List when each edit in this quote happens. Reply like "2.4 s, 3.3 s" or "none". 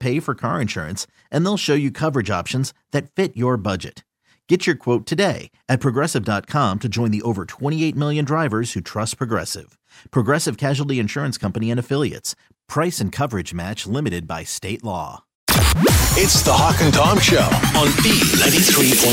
15.3 s